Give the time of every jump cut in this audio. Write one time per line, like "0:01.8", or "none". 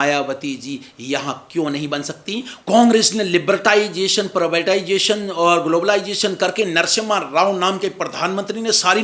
0:02.5